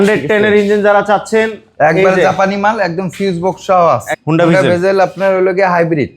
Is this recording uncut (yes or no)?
no